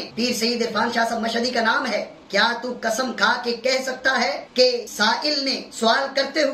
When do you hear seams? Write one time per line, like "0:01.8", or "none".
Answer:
none